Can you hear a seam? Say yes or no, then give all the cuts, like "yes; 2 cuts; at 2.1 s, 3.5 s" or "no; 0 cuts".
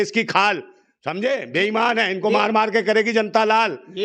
no; 0 cuts